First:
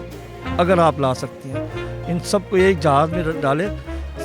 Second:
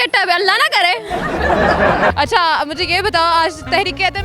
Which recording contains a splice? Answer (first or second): second